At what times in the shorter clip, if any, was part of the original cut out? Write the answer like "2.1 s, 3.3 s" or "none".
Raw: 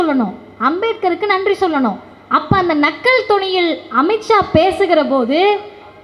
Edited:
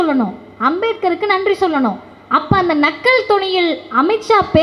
none